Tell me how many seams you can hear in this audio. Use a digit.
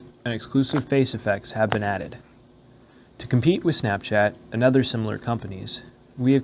0